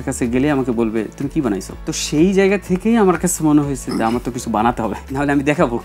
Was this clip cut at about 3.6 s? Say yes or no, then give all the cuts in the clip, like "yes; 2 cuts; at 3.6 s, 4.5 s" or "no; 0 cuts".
no; 2 cuts; at 1.7 s, 5.0 s